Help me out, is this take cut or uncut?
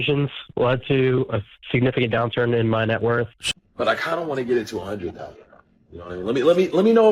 cut